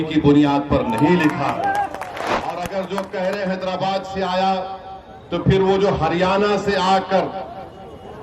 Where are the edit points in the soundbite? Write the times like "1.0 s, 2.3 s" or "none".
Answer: 2.3 s